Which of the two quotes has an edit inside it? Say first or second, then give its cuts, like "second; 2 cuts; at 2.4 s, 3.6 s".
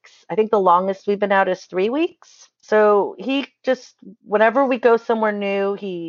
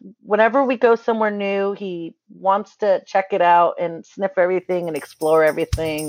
first; 1 cut; at 2.5 s